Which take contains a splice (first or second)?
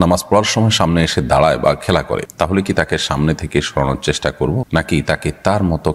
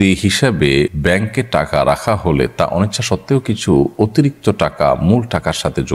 second